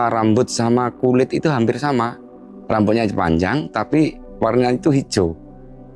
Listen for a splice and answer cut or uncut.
uncut